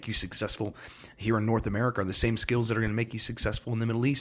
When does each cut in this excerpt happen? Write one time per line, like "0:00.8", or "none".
none